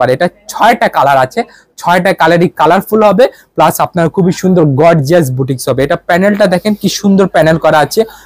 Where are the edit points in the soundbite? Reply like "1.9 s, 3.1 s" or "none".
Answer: none